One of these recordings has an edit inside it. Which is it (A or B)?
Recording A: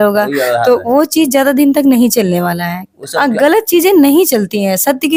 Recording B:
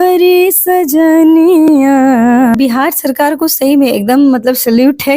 B